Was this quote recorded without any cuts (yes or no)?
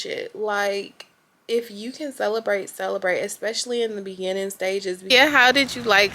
no